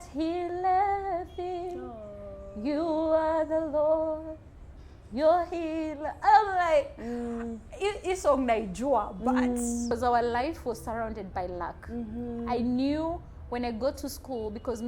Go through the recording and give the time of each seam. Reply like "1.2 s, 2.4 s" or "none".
9.9 s